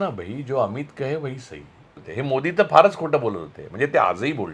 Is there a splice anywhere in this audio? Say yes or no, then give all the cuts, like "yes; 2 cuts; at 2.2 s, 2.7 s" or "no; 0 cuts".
yes; 1 cut; at 2.0 s